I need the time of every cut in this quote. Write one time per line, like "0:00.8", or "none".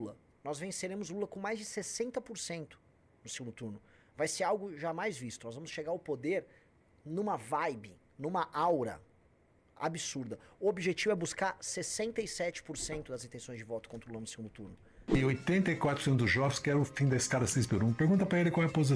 0:15.2

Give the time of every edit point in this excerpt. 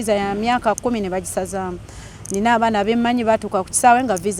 none

